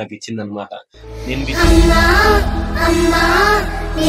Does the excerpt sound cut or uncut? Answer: uncut